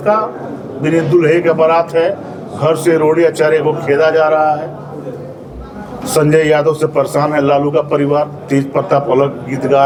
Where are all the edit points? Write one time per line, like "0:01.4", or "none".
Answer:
none